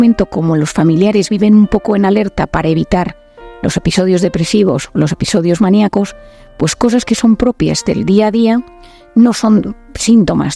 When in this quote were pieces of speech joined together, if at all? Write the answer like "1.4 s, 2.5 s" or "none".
none